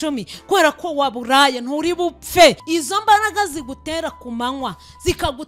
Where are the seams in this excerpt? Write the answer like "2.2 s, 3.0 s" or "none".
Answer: 2.6 s